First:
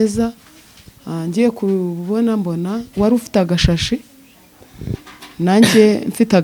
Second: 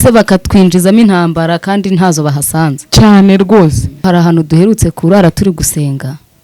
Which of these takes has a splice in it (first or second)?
second